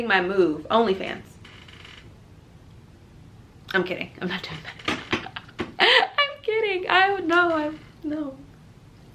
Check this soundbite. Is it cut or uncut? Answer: uncut